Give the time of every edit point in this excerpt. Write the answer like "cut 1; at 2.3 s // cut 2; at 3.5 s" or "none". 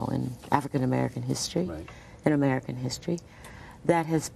none